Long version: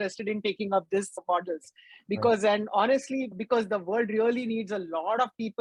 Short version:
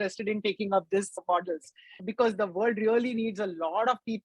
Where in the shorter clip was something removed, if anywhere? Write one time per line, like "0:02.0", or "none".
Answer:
0:02.0